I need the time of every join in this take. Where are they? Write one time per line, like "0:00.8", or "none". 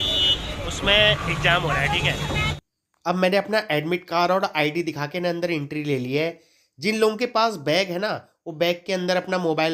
0:02.6